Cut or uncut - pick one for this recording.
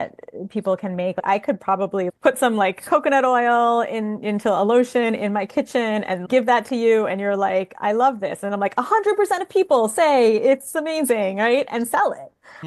cut